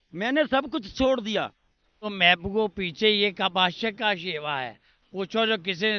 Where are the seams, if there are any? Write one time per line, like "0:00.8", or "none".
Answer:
0:02.1